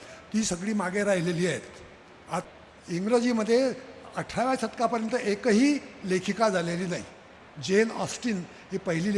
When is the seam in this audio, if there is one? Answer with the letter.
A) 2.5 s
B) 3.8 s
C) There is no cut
A